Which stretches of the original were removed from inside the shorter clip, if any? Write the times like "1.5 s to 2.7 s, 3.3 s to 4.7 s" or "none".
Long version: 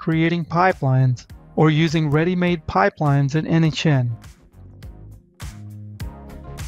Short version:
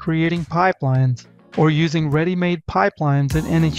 none